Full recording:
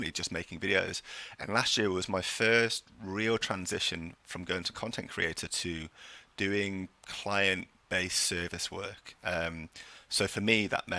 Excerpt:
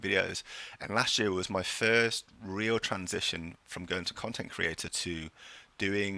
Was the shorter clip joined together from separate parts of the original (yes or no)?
no